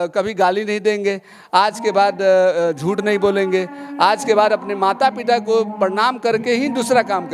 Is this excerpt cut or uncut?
uncut